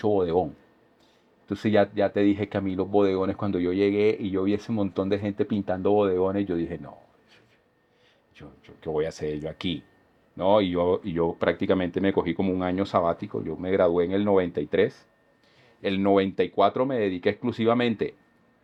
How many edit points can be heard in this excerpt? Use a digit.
0